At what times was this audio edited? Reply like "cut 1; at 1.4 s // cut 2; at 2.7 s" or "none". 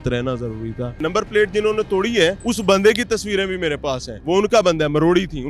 cut 1; at 1.0 s // cut 2; at 2.4 s // cut 3; at 4.1 s